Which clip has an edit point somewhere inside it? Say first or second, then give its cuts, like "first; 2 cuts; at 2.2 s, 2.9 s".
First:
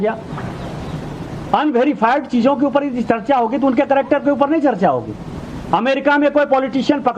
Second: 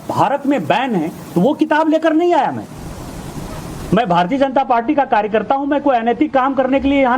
first; 1 cut; at 3.7 s